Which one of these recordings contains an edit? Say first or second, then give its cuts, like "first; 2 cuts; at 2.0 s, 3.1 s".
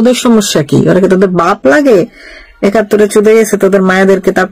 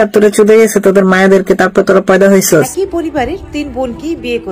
second; 1 cut; at 2.7 s